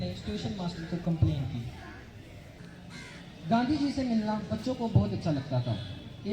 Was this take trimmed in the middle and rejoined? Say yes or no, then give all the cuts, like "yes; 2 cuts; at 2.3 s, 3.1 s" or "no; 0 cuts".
yes; 1 cut; at 2.5 s